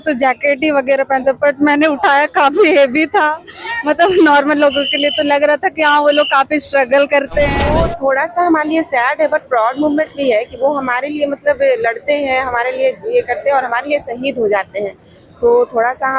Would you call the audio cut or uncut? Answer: cut